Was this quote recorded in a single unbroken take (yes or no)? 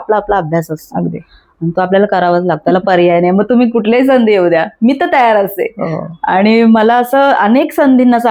yes